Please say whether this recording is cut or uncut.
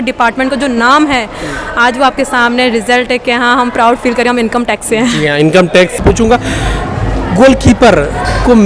cut